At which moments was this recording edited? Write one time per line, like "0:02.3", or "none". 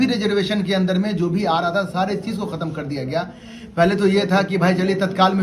none